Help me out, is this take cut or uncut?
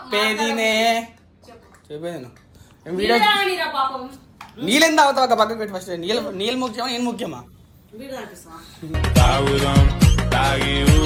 uncut